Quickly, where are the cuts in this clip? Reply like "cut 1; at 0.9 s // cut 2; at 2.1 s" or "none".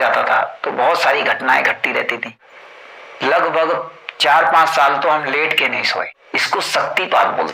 cut 1; at 2.9 s // cut 2; at 6.2 s